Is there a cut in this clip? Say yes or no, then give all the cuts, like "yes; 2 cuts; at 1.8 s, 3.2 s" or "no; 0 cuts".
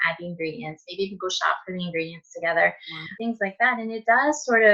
yes; 1 cut; at 3.1 s